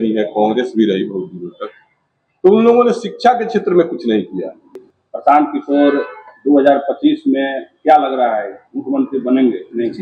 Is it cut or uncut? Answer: cut